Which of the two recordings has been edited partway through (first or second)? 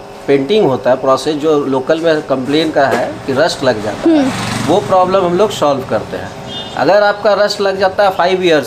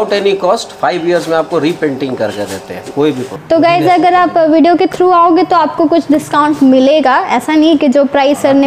second